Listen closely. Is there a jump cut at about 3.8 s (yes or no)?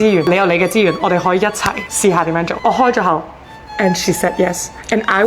no